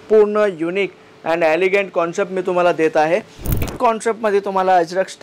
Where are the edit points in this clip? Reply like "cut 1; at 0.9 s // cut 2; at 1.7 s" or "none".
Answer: cut 1; at 3.6 s